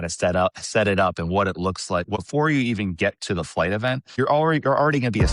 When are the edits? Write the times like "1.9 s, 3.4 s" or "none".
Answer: 2.2 s, 4.1 s